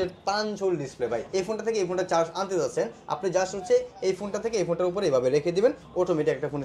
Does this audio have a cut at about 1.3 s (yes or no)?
yes